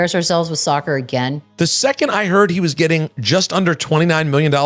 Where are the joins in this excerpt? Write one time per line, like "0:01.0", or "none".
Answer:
0:01.4
0:03.1